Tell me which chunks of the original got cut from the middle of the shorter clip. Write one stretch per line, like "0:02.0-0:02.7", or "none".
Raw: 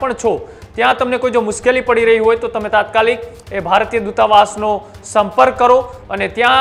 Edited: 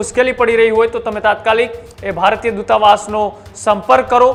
none

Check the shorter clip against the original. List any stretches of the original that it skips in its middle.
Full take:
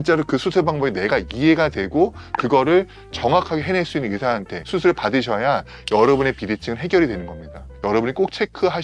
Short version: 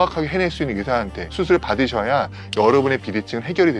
none

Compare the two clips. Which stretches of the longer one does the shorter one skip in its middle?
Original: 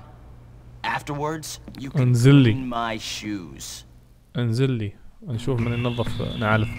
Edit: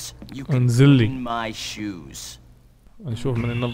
0:04.2-0:05.0

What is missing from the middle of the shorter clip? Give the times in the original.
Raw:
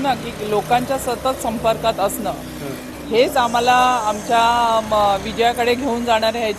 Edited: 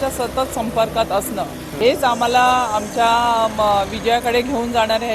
0:02.6-0:03.0

